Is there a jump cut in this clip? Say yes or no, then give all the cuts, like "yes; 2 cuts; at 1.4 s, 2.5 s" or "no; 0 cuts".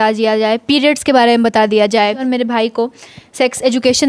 yes; 1 cut; at 2.2 s